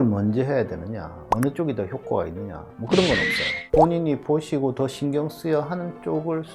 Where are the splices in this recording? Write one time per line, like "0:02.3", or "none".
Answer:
none